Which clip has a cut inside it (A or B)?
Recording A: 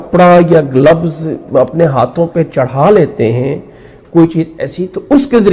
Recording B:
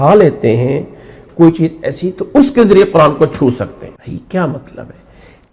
B